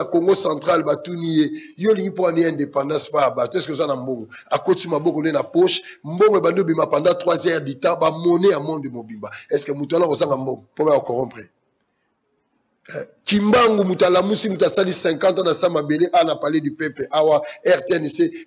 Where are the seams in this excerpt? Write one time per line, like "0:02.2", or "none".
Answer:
none